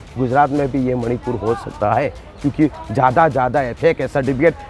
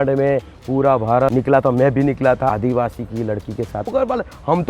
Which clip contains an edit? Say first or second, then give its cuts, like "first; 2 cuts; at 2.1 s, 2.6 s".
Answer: second; 3 cuts; at 1.3 s, 2.5 s, 3.9 s